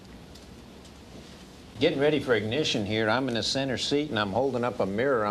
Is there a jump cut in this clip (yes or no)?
yes